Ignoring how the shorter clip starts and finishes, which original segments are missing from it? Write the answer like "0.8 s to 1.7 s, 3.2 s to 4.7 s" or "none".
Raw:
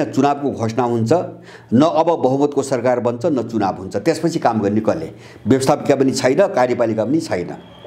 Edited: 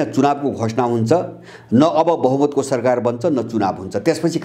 none